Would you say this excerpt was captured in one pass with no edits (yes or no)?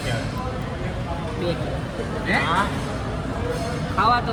yes